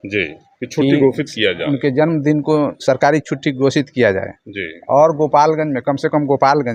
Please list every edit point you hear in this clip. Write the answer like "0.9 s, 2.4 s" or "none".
none